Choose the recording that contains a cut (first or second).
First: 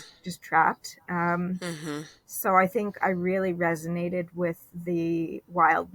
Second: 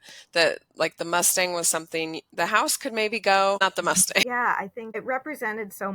second